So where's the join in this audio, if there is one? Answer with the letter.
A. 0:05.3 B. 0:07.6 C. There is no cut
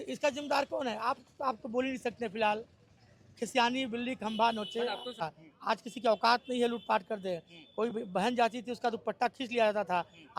A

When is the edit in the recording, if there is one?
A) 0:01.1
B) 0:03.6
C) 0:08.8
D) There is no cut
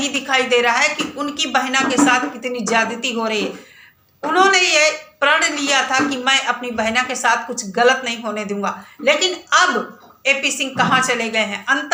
D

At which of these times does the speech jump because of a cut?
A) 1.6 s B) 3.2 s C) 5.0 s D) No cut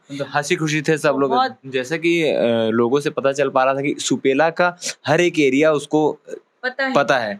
A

